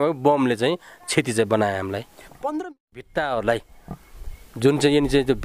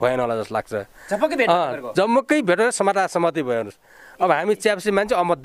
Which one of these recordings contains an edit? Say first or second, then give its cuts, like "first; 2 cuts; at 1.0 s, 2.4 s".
first; 1 cut; at 2.7 s